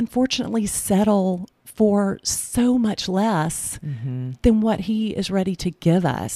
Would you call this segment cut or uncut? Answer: uncut